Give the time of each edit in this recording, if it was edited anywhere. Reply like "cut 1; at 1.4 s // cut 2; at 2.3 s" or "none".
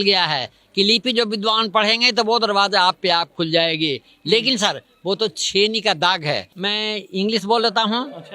cut 1; at 6.5 s